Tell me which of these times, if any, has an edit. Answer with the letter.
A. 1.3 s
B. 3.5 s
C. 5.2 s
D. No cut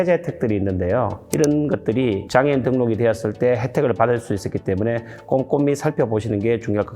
A